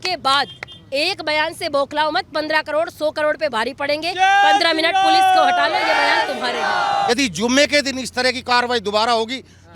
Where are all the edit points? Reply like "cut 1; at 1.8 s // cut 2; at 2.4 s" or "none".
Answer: cut 1; at 7.1 s